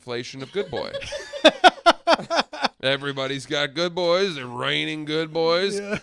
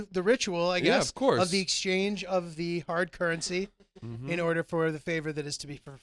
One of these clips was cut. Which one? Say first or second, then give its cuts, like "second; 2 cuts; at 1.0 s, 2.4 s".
first; 1 cut; at 2.8 s